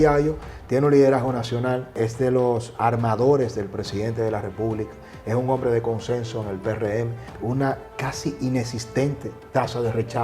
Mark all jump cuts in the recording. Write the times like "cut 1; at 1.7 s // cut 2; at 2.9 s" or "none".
cut 1; at 2.0 s // cut 2; at 7.3 s

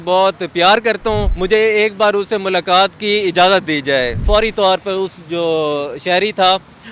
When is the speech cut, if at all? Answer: cut 1; at 1.3 s // cut 2; at 4.2 s

